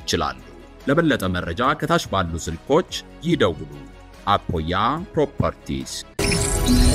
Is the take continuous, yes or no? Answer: no